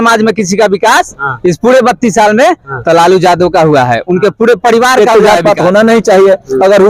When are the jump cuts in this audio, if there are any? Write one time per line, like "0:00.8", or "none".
0:05.0